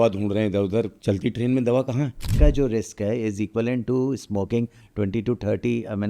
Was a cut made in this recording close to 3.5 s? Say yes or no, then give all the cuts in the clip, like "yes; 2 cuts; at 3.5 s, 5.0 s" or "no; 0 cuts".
no; 2 cuts; at 0.9 s, 2.2 s